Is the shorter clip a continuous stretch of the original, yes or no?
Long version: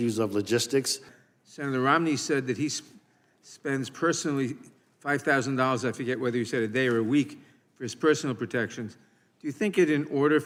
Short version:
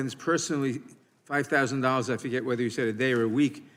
yes